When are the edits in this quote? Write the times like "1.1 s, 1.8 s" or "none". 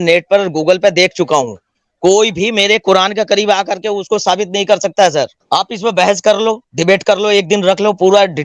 5.4 s